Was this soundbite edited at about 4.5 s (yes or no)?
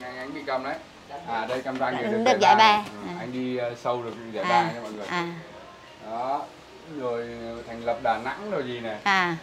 no